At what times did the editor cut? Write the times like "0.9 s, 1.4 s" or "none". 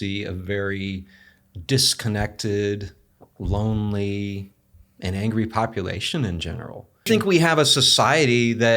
6.9 s